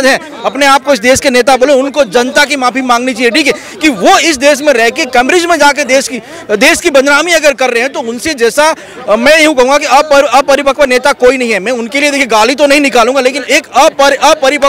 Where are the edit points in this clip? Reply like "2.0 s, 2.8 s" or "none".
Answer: none